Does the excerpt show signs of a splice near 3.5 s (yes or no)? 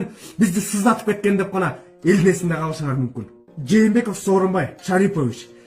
yes